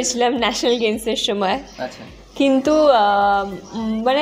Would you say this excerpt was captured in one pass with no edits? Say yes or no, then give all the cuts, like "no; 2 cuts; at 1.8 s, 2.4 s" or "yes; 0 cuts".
yes; 0 cuts